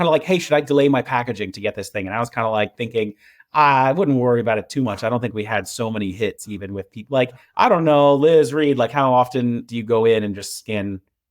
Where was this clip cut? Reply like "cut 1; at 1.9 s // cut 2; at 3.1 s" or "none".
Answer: none